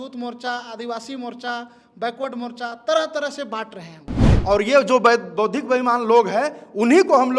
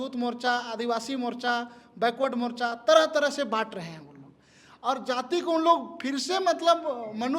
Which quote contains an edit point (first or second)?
first